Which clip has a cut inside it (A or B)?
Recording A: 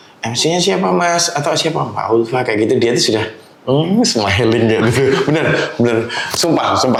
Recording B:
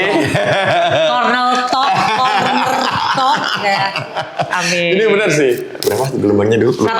B